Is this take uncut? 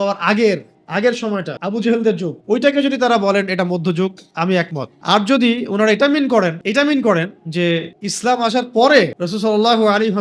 no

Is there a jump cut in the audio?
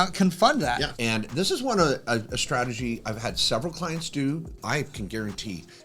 yes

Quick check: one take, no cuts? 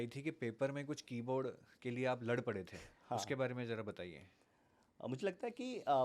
yes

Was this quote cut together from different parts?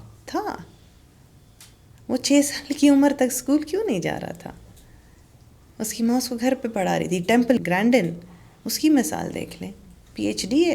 yes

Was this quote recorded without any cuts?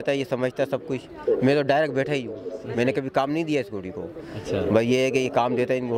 yes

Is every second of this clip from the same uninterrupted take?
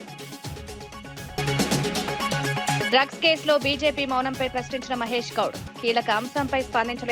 no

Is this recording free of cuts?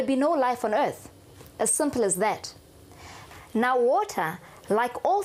no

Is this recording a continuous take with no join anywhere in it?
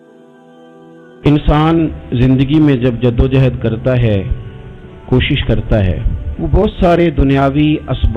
no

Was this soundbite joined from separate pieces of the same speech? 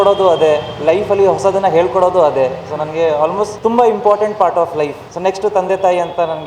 yes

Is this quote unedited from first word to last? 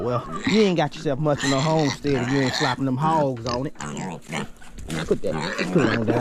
yes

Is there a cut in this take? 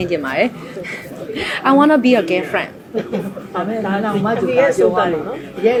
no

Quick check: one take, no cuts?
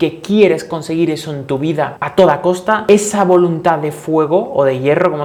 yes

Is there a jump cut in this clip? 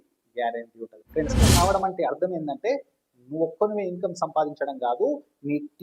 yes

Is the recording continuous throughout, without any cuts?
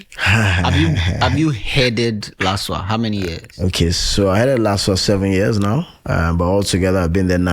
yes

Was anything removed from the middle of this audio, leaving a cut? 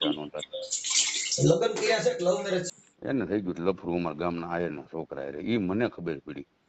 yes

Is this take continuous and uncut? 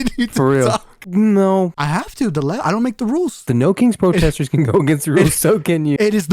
no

